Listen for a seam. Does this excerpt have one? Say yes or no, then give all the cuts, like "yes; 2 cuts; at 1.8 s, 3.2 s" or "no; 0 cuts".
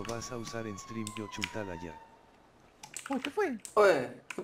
no; 0 cuts